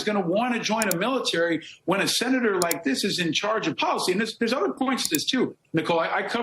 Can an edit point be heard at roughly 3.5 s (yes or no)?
no